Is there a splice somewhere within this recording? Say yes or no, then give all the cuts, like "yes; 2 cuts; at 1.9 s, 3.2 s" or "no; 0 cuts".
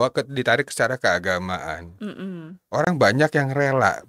no; 0 cuts